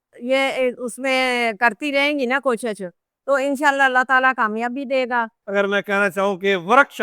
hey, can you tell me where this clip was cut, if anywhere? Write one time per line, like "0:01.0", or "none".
0:05.4